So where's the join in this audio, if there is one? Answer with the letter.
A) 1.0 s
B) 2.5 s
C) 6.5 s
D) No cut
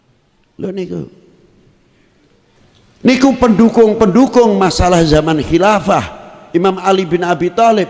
B